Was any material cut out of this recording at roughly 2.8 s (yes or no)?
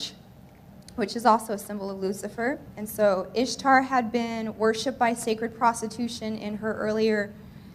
yes